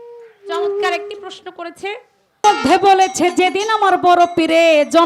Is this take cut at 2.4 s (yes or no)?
yes